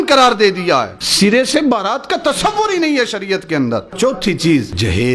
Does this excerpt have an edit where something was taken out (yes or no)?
yes